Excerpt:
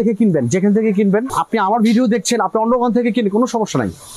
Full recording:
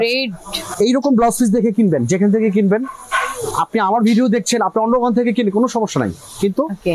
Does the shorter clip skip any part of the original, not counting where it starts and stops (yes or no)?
yes